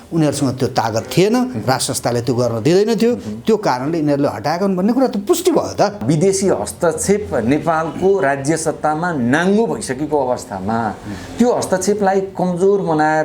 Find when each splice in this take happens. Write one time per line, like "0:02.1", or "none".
0:06.0